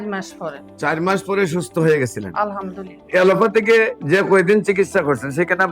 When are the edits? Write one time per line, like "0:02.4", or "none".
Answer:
0:03.0